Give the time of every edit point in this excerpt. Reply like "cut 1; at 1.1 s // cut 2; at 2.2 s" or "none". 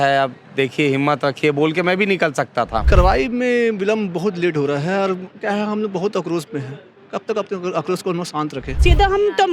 cut 1; at 2.8 s // cut 2; at 8.8 s